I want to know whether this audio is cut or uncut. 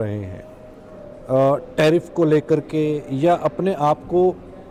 uncut